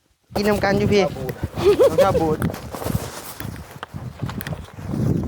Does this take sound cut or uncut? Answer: cut